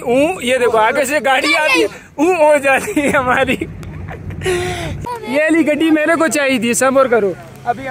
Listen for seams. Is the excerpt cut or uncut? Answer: cut